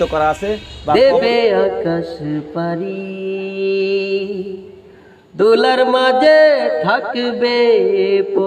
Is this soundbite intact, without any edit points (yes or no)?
no